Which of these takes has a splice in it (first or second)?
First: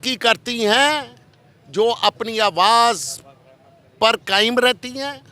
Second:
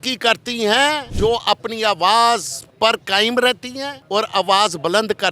second